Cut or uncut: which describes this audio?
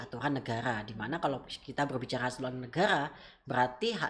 uncut